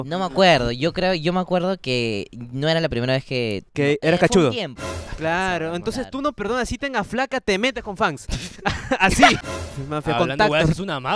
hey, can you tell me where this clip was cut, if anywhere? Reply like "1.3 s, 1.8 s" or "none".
4.8 s, 9.6 s

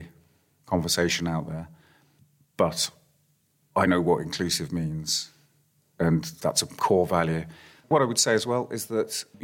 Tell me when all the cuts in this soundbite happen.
6.3 s, 7.9 s

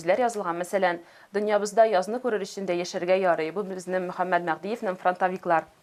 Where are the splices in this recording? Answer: none

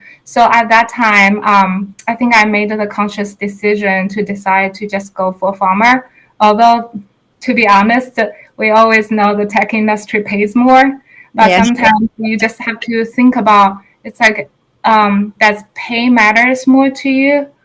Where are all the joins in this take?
none

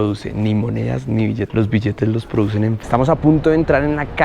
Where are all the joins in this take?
2.7 s

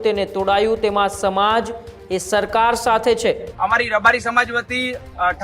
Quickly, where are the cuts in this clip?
3.5 s

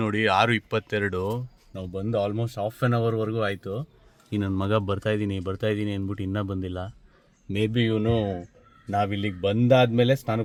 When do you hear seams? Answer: none

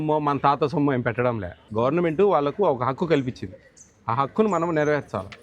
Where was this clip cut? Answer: 1.6 s

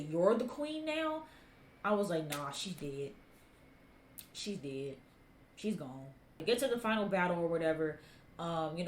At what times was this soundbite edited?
6.4 s

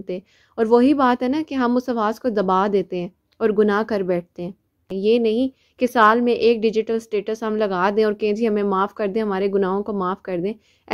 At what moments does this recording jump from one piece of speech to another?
4.8 s

